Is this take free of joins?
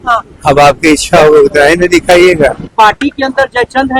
no; 1 cut; at 2.7 s

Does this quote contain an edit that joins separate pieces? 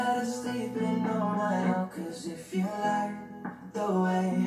no; 0 cuts

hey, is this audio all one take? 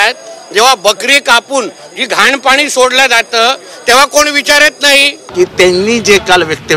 no; 1 cut; at 5.2 s

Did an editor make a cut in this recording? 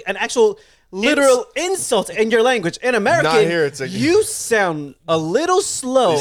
no; 0 cuts

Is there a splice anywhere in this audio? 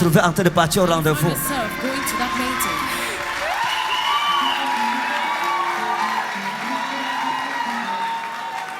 no; 0 cuts

